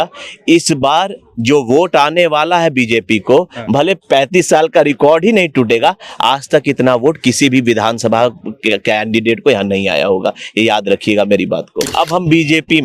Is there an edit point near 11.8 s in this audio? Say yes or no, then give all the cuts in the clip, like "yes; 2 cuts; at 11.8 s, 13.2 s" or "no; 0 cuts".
yes; 1 cut; at 11.8 s